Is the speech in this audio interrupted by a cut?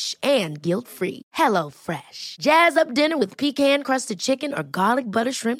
no; 0 cuts

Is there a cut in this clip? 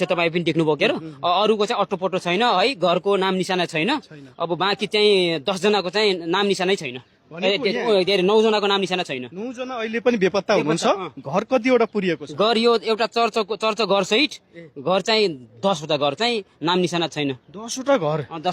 no; 0 cuts

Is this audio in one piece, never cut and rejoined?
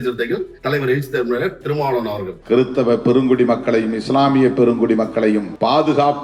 no; 1 cut; at 2.4 s

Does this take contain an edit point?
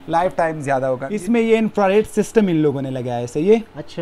yes; 1 cut; at 1.1 s

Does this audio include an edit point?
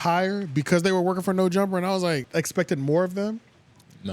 yes; 1 cut; at 2.3 s

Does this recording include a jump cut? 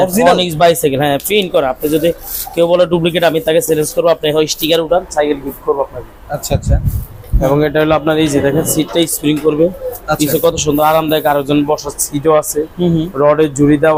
no; 0 cuts

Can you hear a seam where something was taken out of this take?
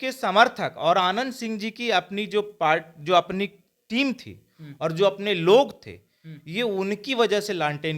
no; 0 cuts

